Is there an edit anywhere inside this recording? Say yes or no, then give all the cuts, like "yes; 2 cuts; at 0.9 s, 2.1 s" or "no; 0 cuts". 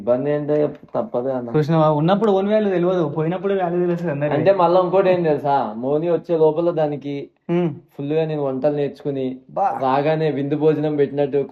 no; 0 cuts